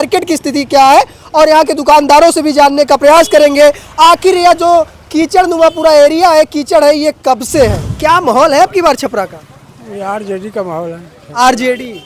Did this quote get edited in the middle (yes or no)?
yes